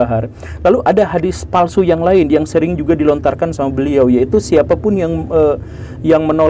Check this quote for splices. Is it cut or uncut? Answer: uncut